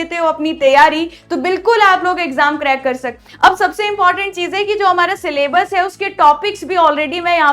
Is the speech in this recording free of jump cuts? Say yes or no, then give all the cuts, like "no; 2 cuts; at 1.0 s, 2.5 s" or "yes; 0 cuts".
no; 1 cut; at 3.1 s